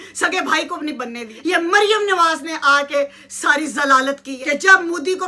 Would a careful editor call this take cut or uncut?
cut